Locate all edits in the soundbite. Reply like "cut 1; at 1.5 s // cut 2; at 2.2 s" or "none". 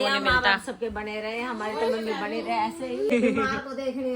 cut 1; at 3.1 s